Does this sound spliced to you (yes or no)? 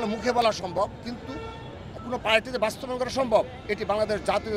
no